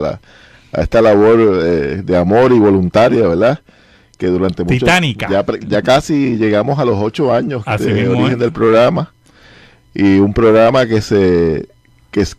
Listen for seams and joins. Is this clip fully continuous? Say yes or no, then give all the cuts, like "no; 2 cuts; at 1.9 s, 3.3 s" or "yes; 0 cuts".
no; 1 cut; at 6.8 s